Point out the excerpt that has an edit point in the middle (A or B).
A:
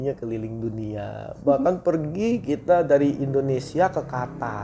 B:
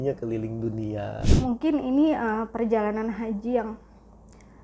B